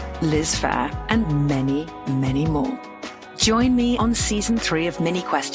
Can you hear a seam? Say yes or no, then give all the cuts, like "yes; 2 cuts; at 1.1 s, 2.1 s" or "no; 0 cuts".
no; 0 cuts